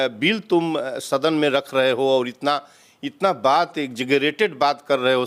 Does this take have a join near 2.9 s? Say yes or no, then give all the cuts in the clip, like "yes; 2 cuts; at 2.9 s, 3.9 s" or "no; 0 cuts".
no; 0 cuts